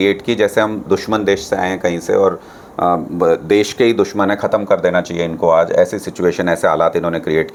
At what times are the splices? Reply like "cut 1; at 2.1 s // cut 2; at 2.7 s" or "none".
none

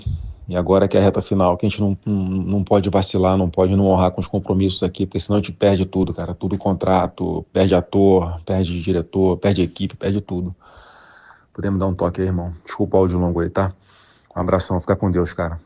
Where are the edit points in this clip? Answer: cut 1; at 14.6 s

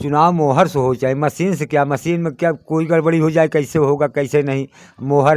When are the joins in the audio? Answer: none

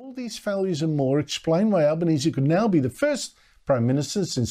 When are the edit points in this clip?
none

